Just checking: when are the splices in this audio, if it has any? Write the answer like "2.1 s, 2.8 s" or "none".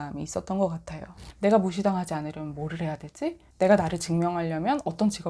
1.2 s, 3.5 s